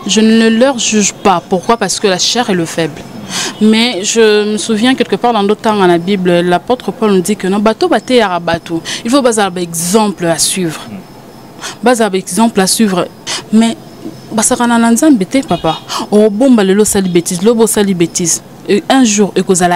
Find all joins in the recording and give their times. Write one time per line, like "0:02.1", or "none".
0:13.2